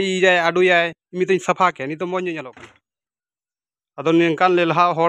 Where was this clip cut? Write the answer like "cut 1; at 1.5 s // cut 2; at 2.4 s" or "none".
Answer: cut 1; at 2.6 s